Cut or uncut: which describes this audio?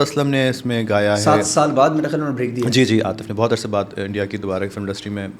uncut